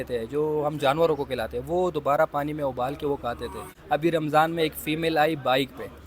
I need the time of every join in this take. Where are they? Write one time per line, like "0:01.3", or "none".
0:03.7